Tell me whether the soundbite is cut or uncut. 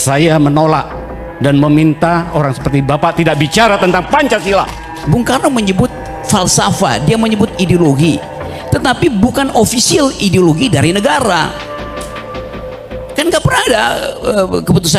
cut